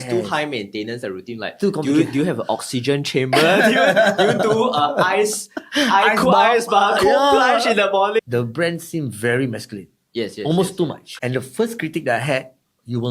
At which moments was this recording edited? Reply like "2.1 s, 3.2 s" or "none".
8.2 s, 11.0 s